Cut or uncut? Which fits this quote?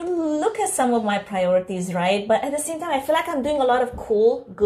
uncut